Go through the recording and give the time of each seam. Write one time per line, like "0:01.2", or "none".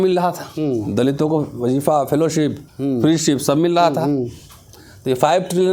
none